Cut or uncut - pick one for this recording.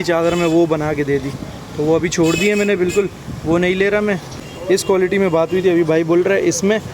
cut